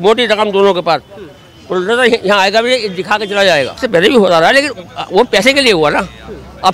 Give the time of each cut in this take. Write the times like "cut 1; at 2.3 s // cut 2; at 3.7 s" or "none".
cut 1; at 3.8 s